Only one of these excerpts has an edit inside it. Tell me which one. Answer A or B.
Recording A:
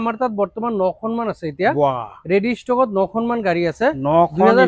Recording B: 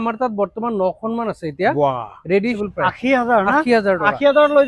B